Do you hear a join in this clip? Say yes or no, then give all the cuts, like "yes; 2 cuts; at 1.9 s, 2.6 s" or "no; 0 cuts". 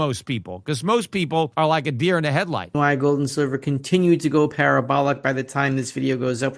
yes; 2 cuts; at 1.5 s, 2.7 s